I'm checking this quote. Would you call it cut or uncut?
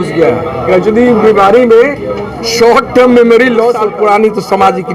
cut